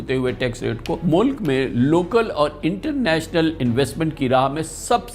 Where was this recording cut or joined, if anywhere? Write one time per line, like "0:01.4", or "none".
0:01.0